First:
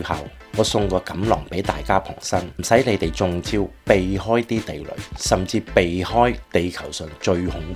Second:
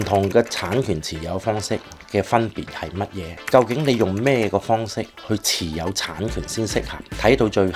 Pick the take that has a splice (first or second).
first